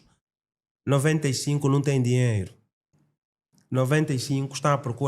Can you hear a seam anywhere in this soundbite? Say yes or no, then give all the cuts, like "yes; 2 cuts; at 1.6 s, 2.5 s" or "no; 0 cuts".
no; 0 cuts